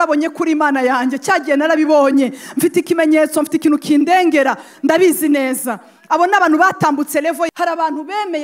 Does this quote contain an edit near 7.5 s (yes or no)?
yes